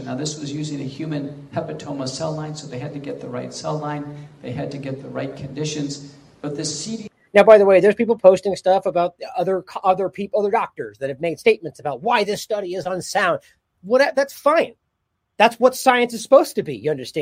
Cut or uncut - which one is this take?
uncut